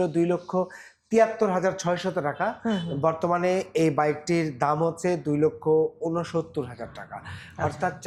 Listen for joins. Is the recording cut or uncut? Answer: uncut